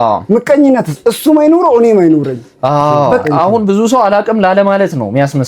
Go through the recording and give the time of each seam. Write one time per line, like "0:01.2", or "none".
0:03.2